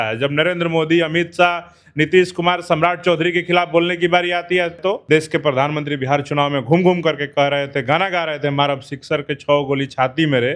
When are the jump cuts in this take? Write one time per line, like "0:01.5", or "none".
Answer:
0:04.9